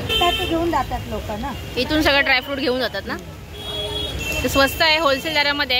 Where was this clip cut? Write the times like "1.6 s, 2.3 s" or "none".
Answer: none